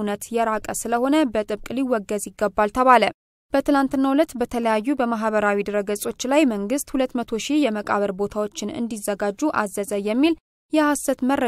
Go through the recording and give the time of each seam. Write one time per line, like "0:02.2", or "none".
none